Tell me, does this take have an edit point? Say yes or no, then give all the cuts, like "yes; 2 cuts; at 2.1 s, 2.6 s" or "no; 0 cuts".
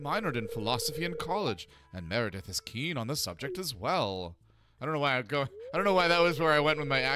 no; 0 cuts